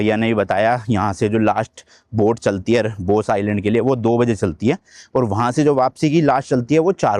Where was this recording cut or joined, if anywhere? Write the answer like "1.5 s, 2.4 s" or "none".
none

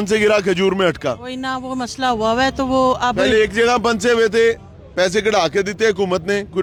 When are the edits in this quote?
none

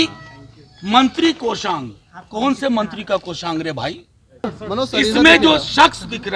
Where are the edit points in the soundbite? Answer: 4.6 s

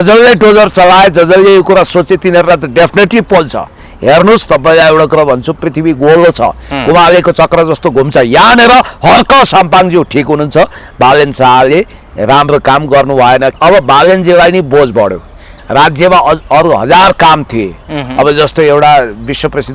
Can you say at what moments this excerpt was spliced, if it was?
13.6 s

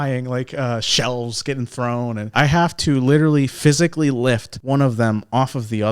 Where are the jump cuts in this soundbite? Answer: 2.3 s, 4.5 s

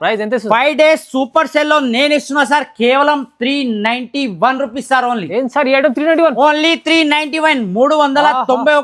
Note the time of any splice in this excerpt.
none

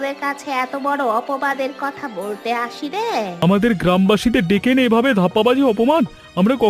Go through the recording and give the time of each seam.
3.3 s

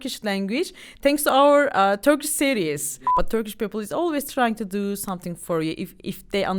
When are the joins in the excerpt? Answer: 3.0 s

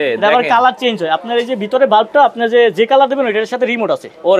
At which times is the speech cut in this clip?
none

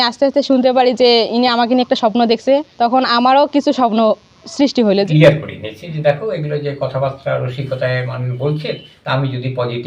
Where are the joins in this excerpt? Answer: 5.1 s, 8.9 s

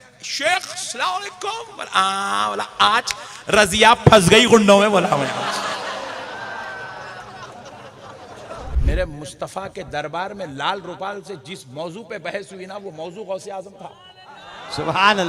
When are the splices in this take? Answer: 8.7 s

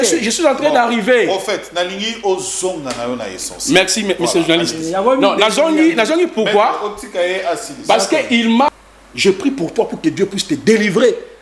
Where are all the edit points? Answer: 8.7 s

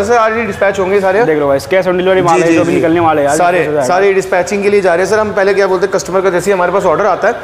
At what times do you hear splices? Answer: none

